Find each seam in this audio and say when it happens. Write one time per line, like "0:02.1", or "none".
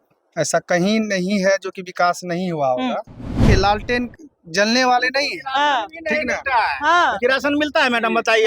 0:03.4